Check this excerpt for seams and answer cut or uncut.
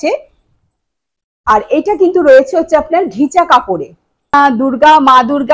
cut